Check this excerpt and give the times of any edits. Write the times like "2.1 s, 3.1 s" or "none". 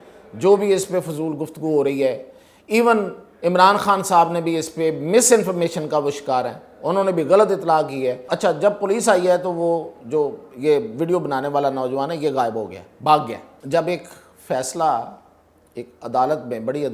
8.2 s, 13.5 s